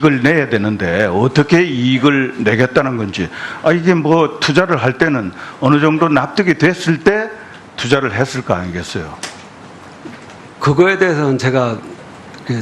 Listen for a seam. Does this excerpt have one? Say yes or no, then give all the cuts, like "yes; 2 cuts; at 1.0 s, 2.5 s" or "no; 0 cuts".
yes; 1 cut; at 1.8 s